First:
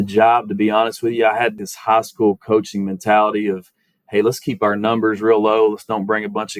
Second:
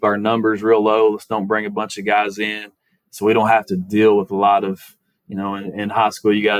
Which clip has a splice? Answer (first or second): first